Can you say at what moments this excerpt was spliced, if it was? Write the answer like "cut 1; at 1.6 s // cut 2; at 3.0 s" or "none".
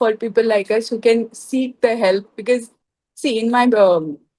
none